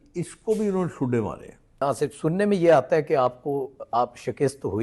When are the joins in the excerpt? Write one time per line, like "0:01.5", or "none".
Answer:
0:01.8